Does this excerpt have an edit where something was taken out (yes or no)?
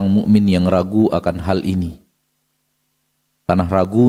no